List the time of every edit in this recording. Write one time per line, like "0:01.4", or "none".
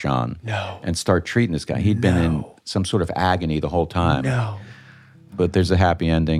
0:05.3